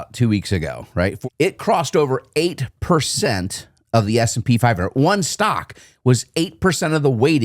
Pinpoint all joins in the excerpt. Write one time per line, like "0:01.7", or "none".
0:01.2